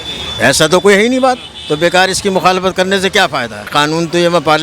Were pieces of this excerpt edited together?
yes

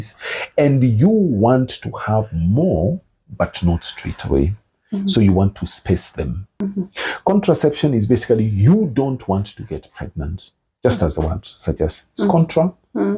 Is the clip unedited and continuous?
no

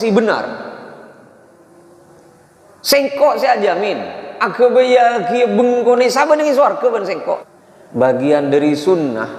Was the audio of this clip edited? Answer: yes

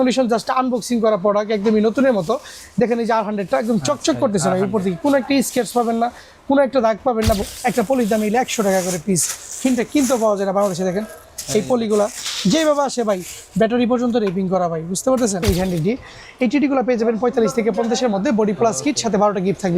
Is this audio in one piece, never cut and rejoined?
no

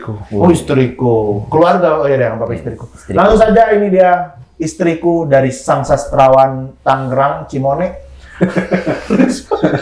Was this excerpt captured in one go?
yes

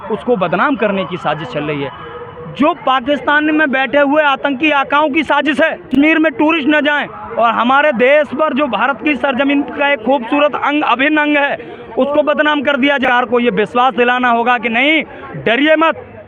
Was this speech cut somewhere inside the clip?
yes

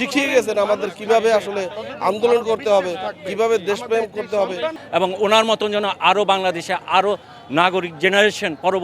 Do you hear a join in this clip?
yes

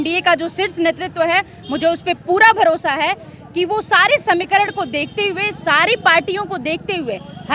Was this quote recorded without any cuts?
yes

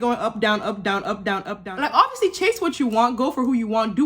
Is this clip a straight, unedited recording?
no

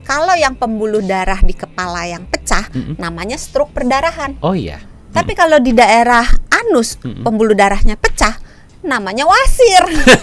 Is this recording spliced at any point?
no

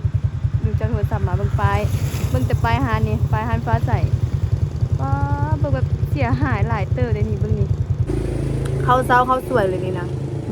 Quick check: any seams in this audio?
yes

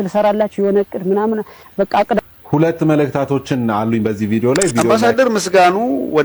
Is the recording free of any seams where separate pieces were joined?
no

